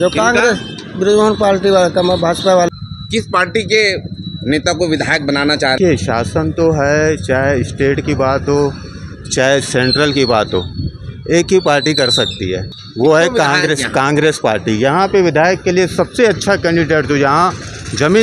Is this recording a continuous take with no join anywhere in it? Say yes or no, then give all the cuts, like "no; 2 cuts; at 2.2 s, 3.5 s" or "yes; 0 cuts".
no; 3 cuts; at 2.7 s, 5.8 s, 12.8 s